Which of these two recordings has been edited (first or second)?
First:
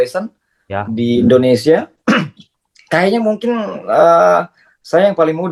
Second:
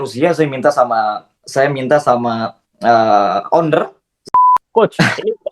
second